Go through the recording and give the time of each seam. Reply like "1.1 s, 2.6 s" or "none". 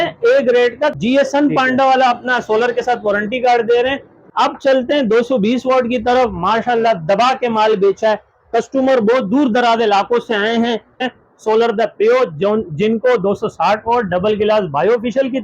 1.0 s, 4.1 s, 11.1 s